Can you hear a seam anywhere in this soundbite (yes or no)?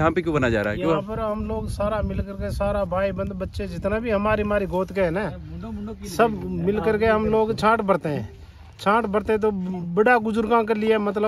no